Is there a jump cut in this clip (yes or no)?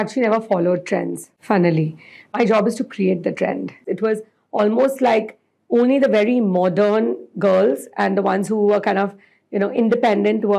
yes